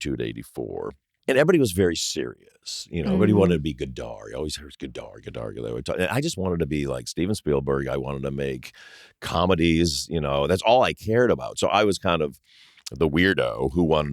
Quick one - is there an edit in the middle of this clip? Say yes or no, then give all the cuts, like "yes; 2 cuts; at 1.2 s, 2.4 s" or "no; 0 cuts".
yes; 1 cut; at 1.0 s